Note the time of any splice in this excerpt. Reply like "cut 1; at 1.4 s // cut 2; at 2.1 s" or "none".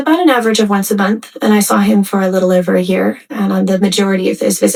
none

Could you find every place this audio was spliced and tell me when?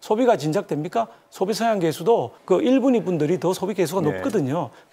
cut 1; at 2.4 s

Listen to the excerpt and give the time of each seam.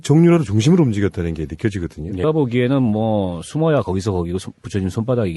none

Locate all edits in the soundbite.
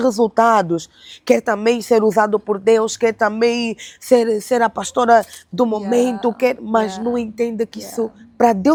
none

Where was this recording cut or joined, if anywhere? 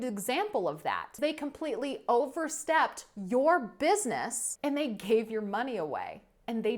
cut 1; at 1.2 s // cut 2; at 4.5 s

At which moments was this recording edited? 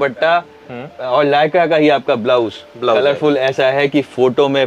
none

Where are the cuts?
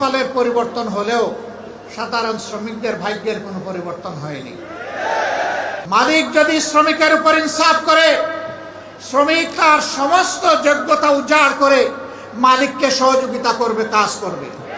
cut 1; at 5.8 s

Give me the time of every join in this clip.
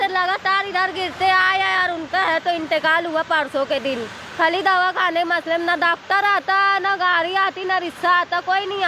none

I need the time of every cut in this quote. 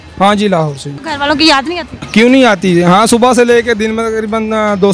cut 1; at 0.9 s // cut 2; at 1.9 s

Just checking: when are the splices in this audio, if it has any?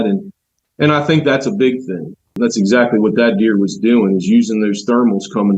cut 1; at 2.3 s

